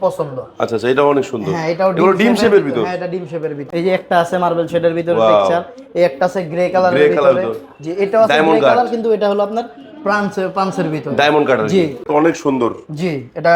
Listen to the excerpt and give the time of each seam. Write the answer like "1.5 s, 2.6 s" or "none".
3.6 s, 12.1 s